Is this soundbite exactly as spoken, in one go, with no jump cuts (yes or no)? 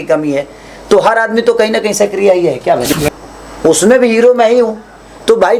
no